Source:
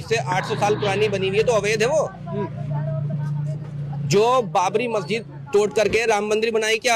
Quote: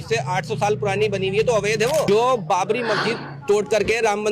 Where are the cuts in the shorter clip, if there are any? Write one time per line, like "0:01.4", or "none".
0:02.1